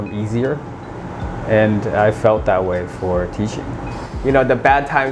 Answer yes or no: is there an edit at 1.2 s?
no